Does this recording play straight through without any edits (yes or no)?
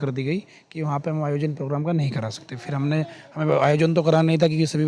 yes